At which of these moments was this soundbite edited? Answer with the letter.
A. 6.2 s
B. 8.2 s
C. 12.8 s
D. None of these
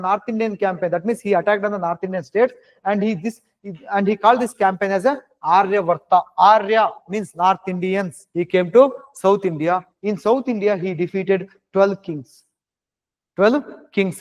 B